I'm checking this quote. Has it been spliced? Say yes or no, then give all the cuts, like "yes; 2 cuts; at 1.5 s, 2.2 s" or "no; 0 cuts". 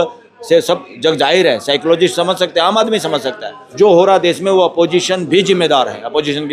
yes; 1 cut; at 3.6 s